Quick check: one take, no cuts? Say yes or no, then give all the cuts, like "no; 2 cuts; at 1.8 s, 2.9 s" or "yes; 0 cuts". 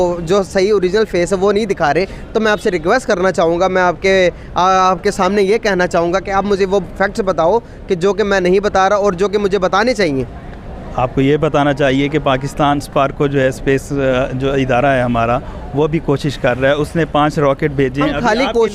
yes; 0 cuts